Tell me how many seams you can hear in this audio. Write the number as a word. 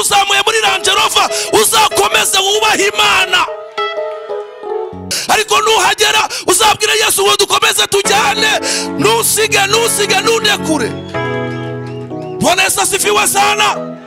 one